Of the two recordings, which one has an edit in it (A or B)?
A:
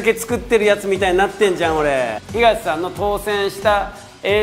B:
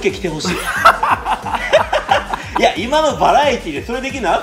A